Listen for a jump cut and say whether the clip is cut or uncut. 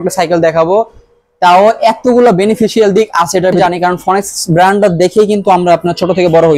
cut